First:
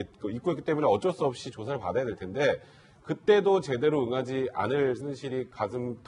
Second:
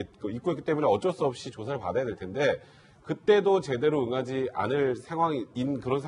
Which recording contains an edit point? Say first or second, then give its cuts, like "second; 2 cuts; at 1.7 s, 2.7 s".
second; 1 cut; at 5.0 s